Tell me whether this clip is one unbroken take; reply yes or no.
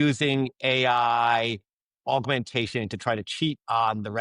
yes